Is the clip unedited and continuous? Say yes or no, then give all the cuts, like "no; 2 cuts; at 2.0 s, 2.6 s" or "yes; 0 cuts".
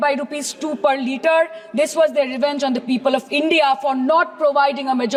yes; 0 cuts